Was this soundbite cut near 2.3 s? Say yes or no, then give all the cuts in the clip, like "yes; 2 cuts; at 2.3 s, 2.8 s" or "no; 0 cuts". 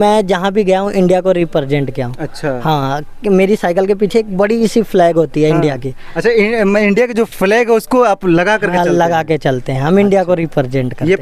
no; 0 cuts